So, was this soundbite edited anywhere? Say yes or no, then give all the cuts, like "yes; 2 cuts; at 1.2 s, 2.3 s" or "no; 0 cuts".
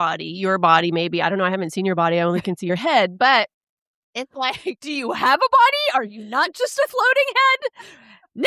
no; 0 cuts